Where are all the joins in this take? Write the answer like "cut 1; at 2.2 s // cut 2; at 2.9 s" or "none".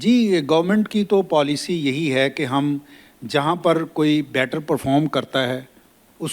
none